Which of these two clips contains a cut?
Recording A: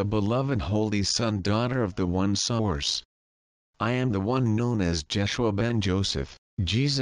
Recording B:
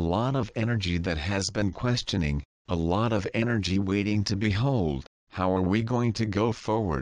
B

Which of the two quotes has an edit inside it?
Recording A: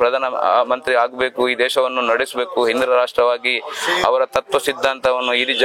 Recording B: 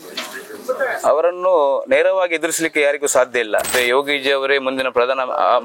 B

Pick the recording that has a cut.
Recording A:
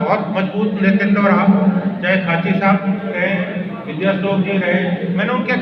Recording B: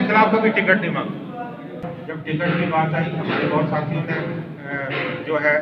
B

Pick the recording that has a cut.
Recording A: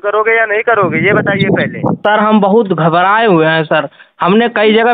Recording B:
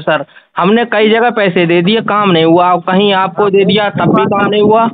A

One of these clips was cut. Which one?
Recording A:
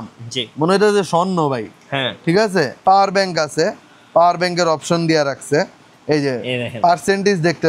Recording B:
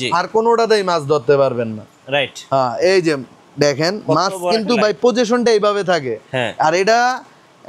A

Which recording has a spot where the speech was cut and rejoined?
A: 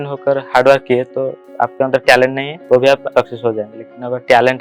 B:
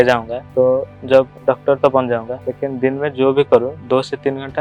A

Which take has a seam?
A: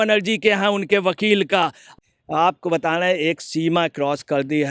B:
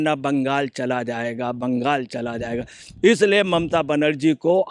A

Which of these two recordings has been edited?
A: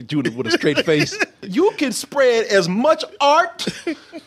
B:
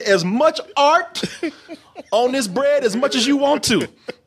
A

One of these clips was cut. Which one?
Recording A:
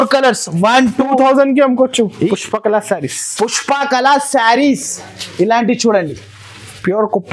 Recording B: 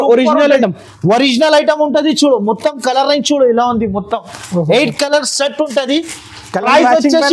A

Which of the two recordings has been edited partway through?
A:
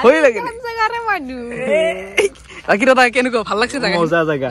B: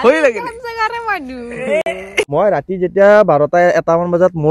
B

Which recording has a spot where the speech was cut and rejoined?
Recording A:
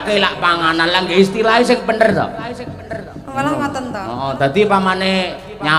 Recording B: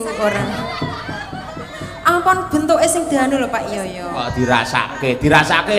B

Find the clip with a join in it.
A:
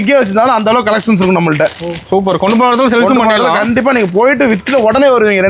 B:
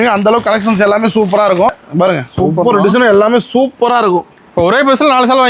B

